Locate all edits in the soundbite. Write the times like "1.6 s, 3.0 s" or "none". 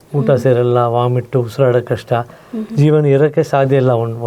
none